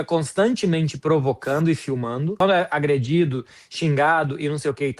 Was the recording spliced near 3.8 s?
no; 1 cut; at 2.3 s

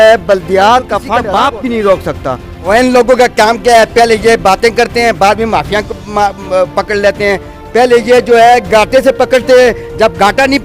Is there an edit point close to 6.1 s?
no; 2 cuts; at 1.2 s, 2.5 s

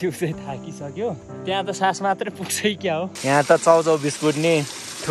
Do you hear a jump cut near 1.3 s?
yes; 2 cuts; at 1.3 s, 3.1 s

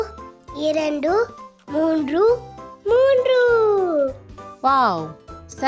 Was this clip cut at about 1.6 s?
yes; 1 cut; at 1.6 s

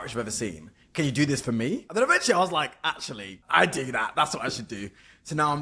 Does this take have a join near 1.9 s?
yes; 2 cuts; at 1.9 s, 3.4 s

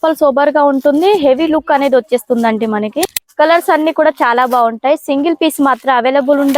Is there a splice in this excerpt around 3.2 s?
yes; 1 cut; at 3.2 s

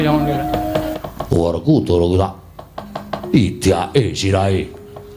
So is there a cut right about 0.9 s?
yes; 1 cut; at 0.9 s

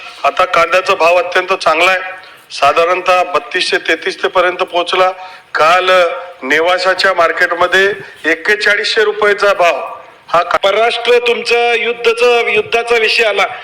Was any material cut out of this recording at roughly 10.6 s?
yes; 1 cut; at 10.6 s

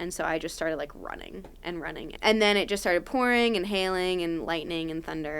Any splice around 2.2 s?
yes; 1 cut; at 2.2 s

